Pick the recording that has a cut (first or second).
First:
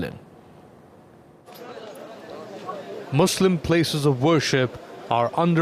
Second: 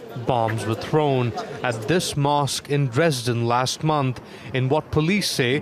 first